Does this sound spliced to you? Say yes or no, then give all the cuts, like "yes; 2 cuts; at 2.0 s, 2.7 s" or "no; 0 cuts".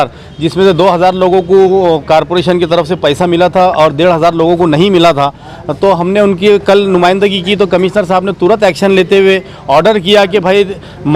no; 0 cuts